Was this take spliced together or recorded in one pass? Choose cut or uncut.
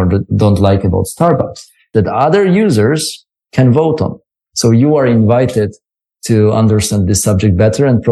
cut